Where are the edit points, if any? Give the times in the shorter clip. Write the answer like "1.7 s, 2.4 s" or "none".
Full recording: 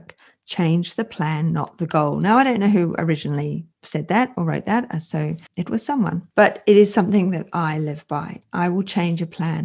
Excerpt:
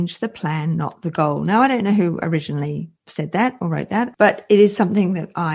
4.1 s